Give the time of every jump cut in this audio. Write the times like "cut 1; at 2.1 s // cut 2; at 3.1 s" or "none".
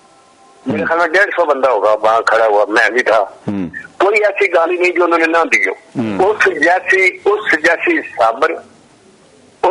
cut 1; at 6.1 s